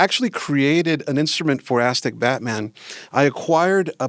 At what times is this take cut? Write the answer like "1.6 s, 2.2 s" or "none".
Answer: none